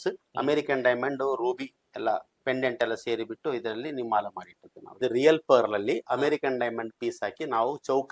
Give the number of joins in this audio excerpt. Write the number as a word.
one